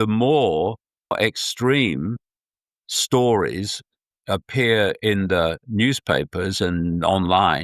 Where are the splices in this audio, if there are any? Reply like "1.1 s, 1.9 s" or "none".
1.1 s

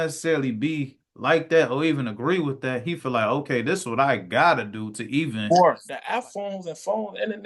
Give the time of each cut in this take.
5.9 s

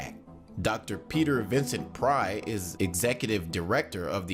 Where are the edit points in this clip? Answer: 2.8 s

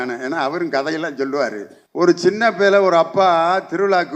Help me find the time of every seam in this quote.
2.2 s

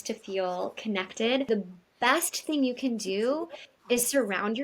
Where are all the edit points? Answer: 1.5 s

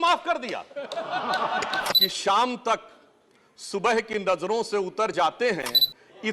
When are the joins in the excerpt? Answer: 2.0 s

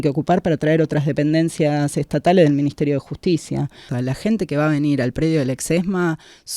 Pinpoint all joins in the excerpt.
3.8 s

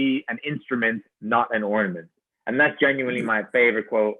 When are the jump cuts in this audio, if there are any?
none

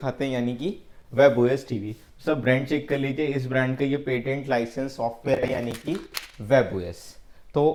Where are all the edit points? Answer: none

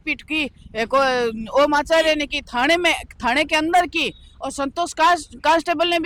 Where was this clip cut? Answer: none

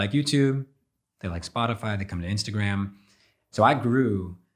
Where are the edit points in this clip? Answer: 3.4 s

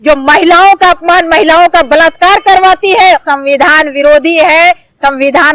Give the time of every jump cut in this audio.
3.2 s

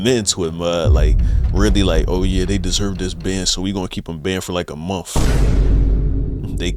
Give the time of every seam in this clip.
none

